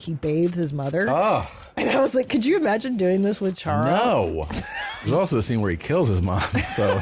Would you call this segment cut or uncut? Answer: cut